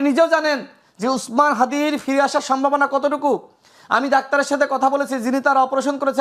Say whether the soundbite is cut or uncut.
uncut